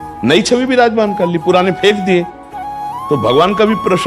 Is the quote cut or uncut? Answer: uncut